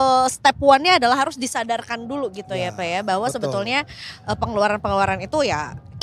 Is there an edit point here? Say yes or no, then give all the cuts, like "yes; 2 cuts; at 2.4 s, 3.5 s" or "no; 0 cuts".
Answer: no; 0 cuts